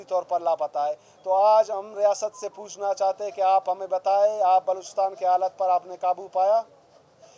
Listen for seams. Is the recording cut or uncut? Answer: uncut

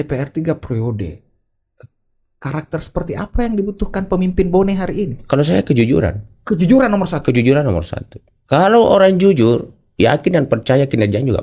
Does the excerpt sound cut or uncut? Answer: uncut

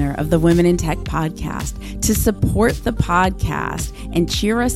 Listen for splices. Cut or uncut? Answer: uncut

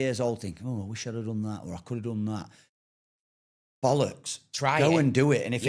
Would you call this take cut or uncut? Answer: uncut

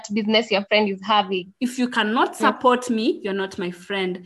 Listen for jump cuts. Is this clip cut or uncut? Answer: cut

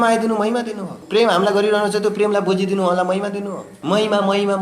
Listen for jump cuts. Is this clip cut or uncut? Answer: cut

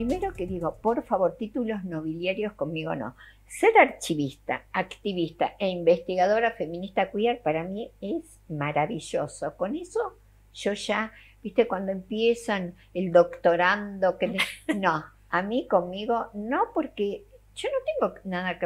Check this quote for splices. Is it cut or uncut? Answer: cut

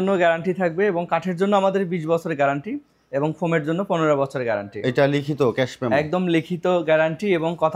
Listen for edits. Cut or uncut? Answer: uncut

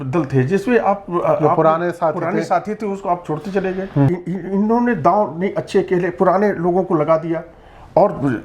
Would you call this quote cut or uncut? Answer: cut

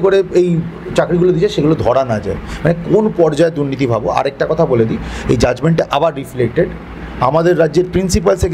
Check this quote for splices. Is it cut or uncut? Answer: uncut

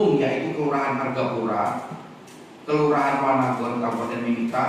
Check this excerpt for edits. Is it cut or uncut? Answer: uncut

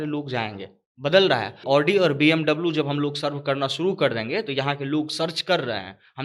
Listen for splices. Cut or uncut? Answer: cut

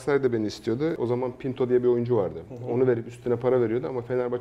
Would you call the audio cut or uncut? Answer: cut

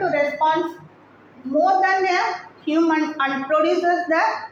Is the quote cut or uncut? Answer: uncut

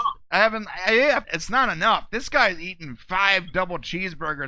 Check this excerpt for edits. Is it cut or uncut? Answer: cut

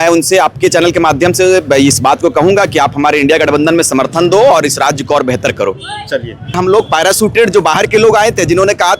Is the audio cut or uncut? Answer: cut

